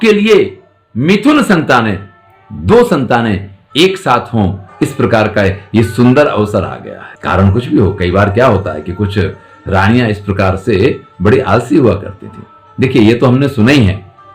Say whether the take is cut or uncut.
uncut